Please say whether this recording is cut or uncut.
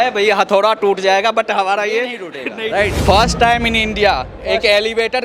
cut